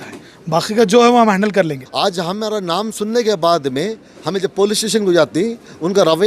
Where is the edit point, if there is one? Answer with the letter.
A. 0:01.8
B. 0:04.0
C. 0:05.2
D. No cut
A